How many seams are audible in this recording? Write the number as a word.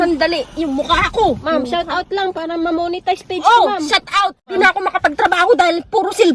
one